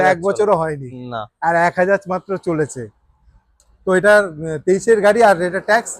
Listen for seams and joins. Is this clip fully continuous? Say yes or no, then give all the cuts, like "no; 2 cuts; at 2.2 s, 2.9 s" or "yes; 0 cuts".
yes; 0 cuts